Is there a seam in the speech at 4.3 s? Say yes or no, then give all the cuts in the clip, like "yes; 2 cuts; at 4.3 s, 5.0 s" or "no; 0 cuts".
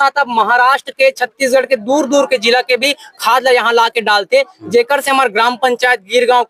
no; 0 cuts